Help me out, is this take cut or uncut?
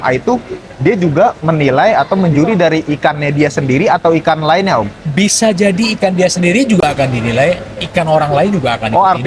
uncut